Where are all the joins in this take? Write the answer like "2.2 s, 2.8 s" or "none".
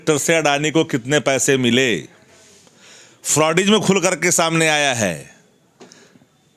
none